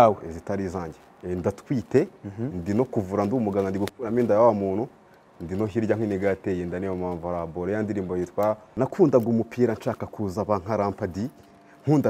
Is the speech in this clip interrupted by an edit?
yes; 2 cuts; at 1.2 s, 8.7 s

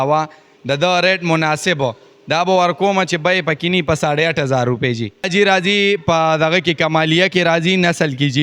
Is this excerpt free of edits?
no; 1 cut; at 5.3 s

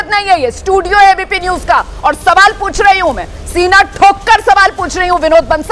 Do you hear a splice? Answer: no; 0 cuts

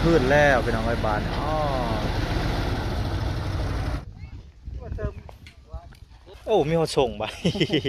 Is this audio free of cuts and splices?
no; 1 cut; at 4.0 s

